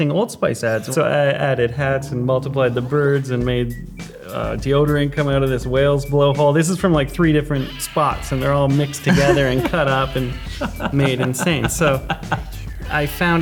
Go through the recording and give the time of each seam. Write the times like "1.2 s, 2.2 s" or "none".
0.9 s